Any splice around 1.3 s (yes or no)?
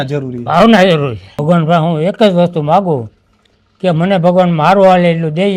yes